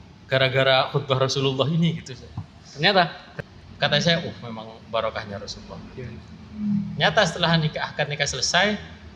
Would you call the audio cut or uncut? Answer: cut